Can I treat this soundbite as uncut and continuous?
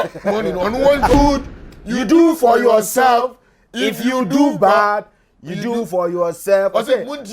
no; 1 cut; at 1.1 s

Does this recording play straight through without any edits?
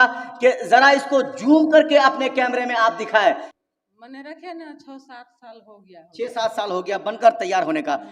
no; 1 cut; at 3.5 s

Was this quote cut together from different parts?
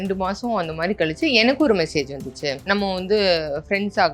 yes; 1 cut; at 2.6 s

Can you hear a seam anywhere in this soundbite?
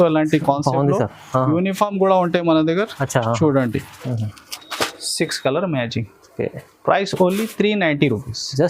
yes; 1 cut; at 4.0 s

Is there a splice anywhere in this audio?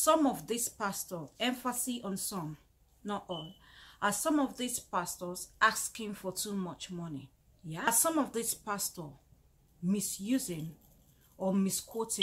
yes; 1 cut; at 7.9 s

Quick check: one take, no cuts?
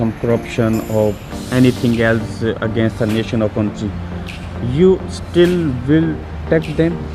yes; 0 cuts

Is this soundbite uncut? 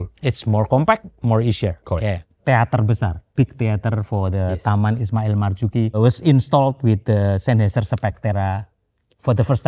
no; 1 cut; at 2.4 s

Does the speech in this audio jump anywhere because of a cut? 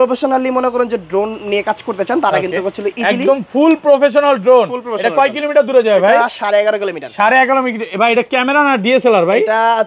no; 0 cuts

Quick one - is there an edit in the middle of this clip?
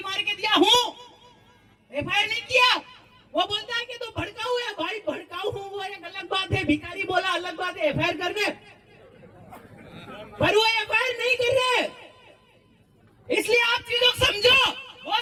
no; 0 cuts

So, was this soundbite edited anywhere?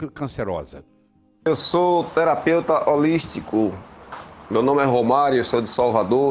yes; 1 cut; at 1.5 s

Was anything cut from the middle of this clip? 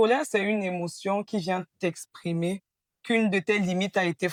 no; 0 cuts

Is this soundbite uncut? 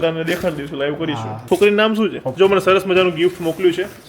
no; 2 cuts; at 1.3 s, 2.2 s

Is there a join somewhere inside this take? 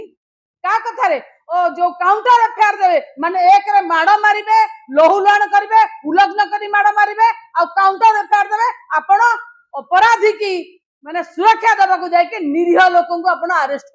no; 0 cuts

